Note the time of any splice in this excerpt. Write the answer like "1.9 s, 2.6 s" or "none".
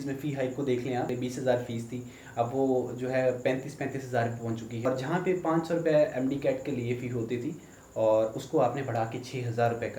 1.1 s, 4.9 s